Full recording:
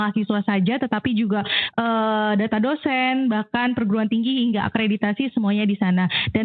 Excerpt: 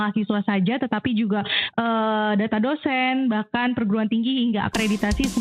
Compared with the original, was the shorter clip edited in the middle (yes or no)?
no